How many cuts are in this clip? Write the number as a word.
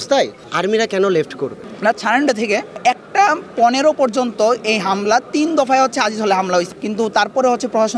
two